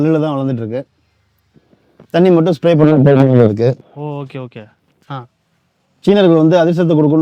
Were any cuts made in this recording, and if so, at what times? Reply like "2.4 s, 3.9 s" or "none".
4.9 s